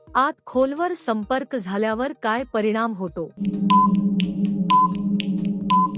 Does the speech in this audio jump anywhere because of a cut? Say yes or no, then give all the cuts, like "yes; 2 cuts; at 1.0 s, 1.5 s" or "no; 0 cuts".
yes; 1 cut; at 3.4 s